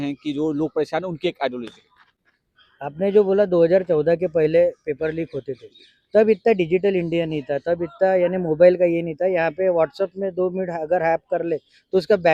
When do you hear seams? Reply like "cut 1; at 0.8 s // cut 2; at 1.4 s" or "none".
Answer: none